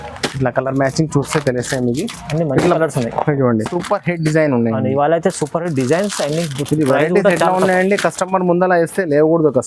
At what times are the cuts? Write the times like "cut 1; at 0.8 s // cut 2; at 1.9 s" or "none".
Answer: cut 1; at 3.7 s

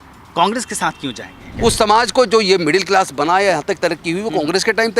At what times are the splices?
cut 1; at 1.4 s

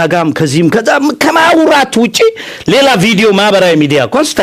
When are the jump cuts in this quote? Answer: none

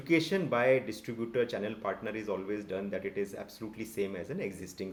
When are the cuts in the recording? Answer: none

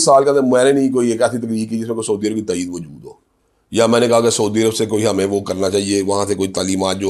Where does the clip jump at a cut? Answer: none

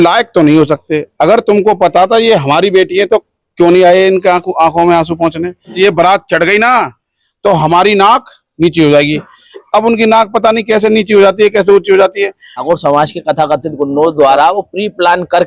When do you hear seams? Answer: cut 1; at 5.7 s // cut 2; at 12.5 s

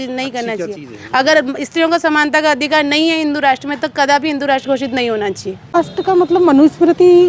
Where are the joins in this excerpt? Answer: cut 1; at 5.7 s

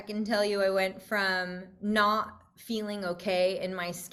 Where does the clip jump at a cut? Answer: none

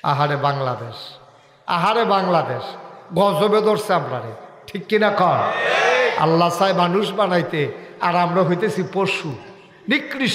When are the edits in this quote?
none

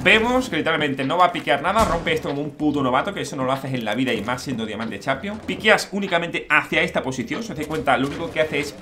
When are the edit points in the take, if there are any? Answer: cut 1; at 5.4 s

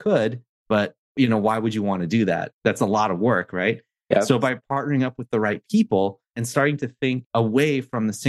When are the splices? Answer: cut 1; at 1.1 s // cut 2; at 2.5 s // cut 3; at 4.6 s // cut 4; at 6.4 s // cut 5; at 7.2 s

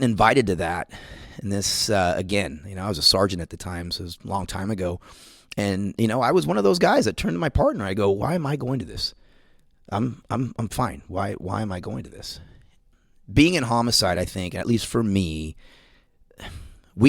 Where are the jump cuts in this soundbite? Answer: cut 1; at 12.7 s

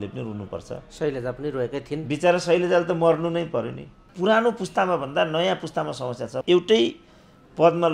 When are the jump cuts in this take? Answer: cut 1; at 4.0 s // cut 2; at 6.4 s

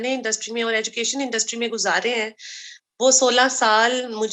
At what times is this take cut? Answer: none

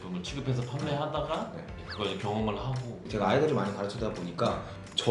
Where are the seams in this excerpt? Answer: cut 1; at 1.7 s // cut 2; at 3.0 s

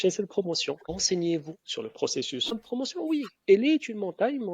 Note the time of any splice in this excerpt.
cut 1; at 1.0 s // cut 2; at 2.6 s

